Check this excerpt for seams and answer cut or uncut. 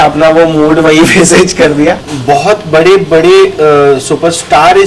cut